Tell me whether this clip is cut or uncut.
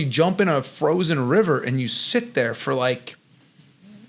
uncut